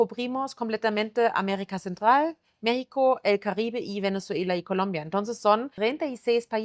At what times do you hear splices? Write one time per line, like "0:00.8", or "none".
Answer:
0:05.7